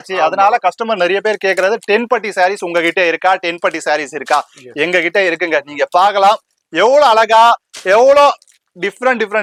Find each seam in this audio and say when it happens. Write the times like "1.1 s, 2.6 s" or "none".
none